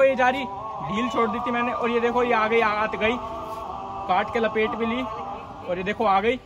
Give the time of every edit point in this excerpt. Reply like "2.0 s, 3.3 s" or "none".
none